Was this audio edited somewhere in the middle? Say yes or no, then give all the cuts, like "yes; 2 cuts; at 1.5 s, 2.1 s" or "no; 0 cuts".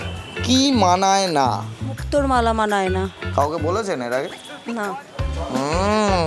no; 0 cuts